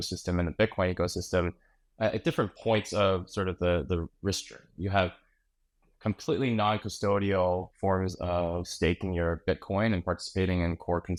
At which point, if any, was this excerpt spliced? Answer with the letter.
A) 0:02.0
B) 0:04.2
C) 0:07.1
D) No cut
D